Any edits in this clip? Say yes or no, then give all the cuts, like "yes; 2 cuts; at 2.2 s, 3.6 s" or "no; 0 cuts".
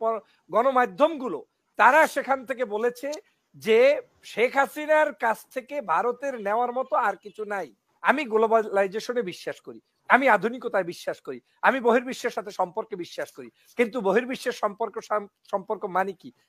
yes; 1 cut; at 8.1 s